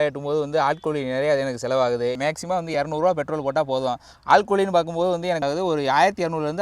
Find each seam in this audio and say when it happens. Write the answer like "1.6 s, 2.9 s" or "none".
2.2 s, 5.4 s